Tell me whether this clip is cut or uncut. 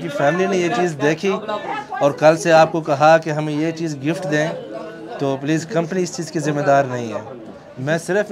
uncut